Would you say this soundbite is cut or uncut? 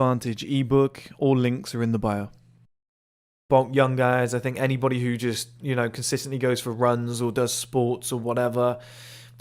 cut